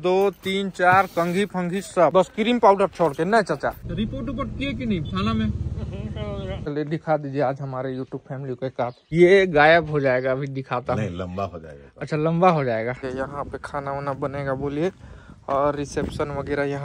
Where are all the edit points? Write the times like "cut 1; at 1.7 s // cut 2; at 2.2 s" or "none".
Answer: cut 1; at 2.1 s // cut 2; at 3.8 s // cut 3; at 6.7 s // cut 4; at 9.1 s // cut 5; at 13.0 s